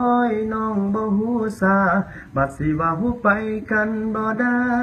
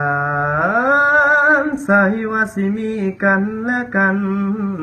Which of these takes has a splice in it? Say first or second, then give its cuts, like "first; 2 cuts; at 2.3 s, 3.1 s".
second; 1 cut; at 3.6 s